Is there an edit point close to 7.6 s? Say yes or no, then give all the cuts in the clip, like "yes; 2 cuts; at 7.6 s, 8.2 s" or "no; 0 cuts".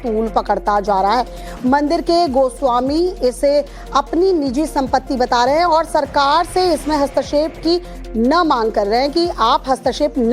no; 1 cut; at 2.5 s